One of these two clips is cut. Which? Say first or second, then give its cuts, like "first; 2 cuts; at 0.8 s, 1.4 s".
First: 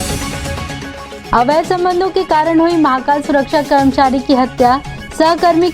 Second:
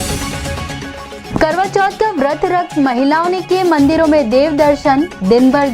first; 1 cut; at 1.2 s